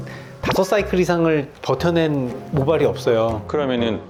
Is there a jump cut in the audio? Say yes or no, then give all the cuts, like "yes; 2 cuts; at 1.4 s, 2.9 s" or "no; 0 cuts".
no; 0 cuts